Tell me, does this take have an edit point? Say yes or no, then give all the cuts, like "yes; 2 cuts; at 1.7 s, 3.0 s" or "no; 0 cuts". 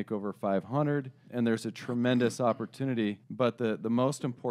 yes; 2 cuts; at 1.2 s, 3.2 s